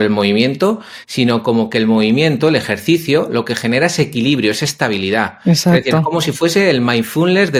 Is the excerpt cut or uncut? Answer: uncut